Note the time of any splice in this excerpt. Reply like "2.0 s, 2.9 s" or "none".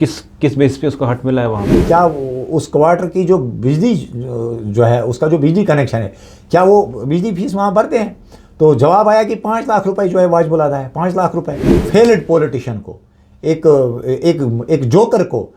1.8 s, 11.7 s